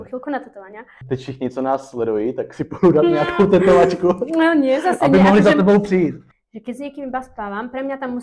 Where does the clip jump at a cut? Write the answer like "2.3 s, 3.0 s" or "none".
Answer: 0.9 s, 6.3 s